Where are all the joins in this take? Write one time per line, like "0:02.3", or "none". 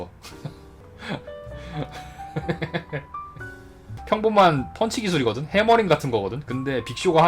0:03.9